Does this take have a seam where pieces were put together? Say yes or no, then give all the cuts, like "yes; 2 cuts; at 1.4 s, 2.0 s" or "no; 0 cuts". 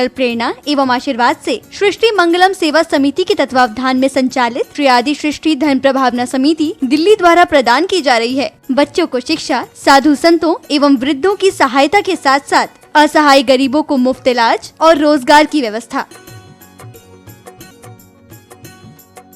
no; 0 cuts